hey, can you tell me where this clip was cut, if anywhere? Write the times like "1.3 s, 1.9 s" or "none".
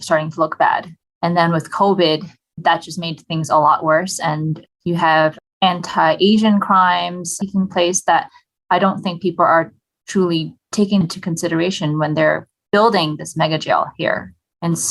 2.5 s, 11.0 s